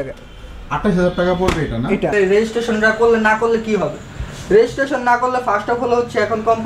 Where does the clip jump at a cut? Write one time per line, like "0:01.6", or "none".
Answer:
0:02.1